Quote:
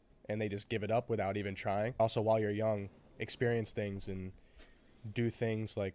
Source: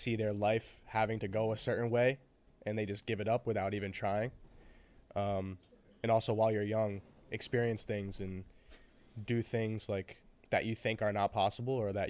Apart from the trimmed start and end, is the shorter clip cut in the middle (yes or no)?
yes